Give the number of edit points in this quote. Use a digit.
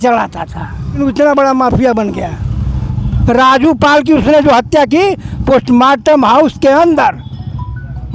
1